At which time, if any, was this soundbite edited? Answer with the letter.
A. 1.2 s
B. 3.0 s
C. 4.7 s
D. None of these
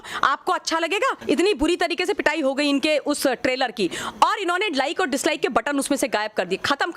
A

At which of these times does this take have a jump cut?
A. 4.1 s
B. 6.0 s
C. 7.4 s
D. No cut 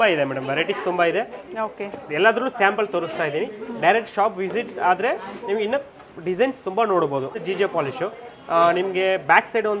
C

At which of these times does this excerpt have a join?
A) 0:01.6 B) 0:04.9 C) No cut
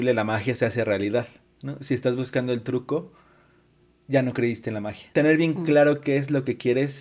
B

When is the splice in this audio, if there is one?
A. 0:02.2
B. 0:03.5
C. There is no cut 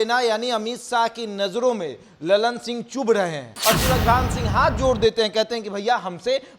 B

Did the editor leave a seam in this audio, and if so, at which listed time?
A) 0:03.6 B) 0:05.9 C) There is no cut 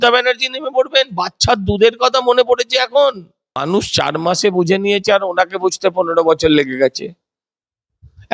A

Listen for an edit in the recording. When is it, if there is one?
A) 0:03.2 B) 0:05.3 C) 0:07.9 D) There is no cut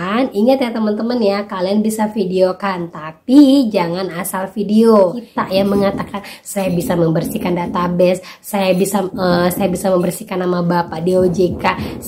B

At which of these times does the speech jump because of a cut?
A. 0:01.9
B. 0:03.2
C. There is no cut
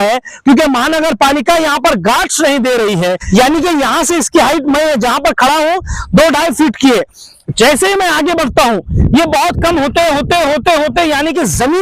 B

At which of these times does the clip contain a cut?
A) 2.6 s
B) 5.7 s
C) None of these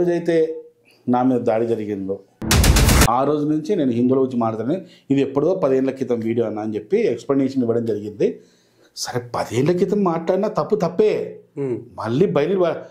A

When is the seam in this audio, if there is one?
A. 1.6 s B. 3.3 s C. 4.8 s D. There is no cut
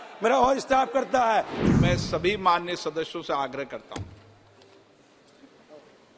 A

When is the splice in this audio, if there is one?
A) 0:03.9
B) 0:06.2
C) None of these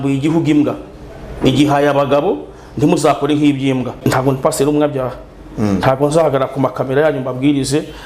A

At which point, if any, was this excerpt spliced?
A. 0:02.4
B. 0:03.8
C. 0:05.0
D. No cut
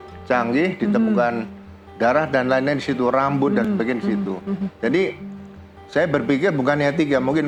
D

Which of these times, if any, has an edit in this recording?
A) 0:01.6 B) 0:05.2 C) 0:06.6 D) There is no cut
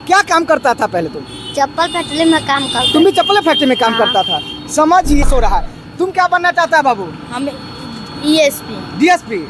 B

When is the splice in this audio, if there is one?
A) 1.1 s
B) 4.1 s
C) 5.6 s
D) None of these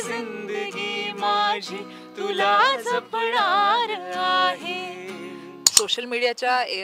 C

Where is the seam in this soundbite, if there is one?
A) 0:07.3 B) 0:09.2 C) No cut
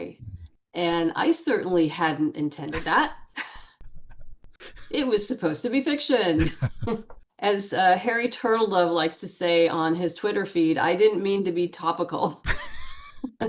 A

